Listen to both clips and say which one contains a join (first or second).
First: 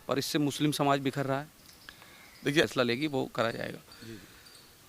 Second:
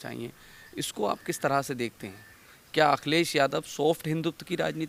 first